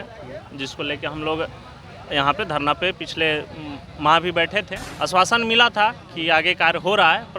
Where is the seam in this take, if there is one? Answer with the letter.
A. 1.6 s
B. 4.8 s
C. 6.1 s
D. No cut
B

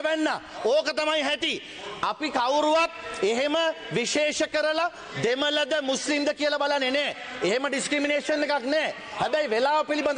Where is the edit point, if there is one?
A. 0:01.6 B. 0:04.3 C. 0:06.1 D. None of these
D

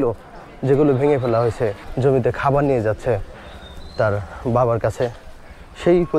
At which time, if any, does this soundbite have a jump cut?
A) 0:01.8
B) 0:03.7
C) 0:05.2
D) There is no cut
A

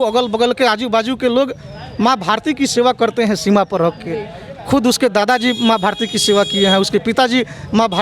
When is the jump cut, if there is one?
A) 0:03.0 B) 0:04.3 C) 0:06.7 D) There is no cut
D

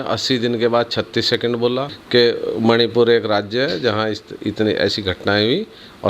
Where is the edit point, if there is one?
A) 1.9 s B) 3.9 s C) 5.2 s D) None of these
A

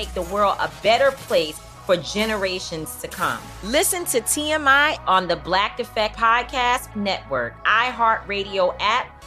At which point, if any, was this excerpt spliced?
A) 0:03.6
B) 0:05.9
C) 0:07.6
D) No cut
D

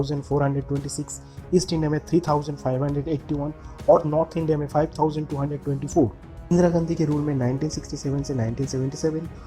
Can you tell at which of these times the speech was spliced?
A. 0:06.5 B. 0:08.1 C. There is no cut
A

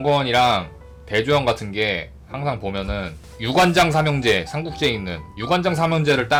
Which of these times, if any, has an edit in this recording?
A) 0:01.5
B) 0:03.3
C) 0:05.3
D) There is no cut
D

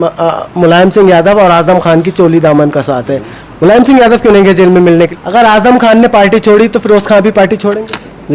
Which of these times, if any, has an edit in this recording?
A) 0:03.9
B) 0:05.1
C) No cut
B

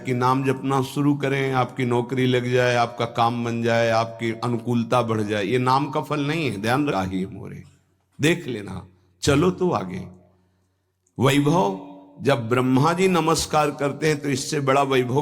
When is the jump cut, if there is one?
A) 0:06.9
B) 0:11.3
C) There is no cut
A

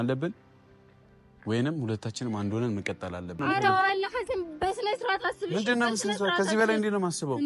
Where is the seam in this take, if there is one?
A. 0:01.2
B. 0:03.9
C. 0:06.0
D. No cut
B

